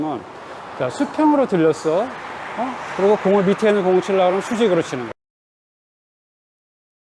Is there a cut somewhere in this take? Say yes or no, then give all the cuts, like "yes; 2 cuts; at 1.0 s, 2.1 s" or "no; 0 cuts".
no; 0 cuts